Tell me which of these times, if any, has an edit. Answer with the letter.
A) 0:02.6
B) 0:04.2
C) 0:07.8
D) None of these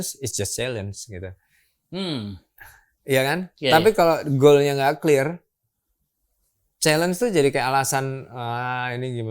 D